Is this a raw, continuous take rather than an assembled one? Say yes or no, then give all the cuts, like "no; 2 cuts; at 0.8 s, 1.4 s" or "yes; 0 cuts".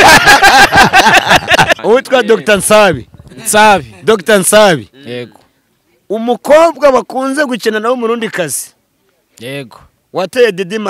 no; 1 cut; at 1.8 s